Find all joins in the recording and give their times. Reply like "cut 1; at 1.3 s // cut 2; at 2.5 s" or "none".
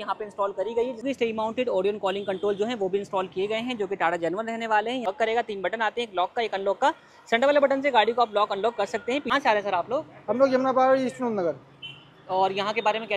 cut 1; at 1.0 s // cut 2; at 5.1 s // cut 3; at 9.3 s